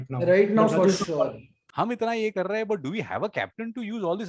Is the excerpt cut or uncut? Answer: cut